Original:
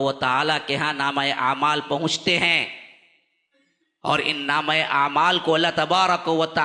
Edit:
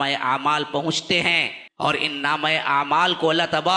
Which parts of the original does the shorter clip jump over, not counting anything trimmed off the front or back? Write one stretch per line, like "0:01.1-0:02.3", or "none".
0:02.8-0:03.8